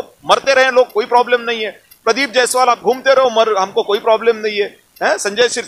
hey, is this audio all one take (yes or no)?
yes